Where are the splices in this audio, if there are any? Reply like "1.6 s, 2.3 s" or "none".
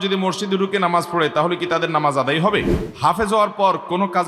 2.8 s